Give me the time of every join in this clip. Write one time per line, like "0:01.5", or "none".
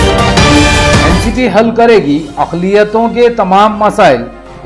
0:01.1